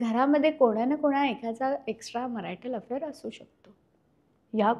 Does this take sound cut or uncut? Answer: uncut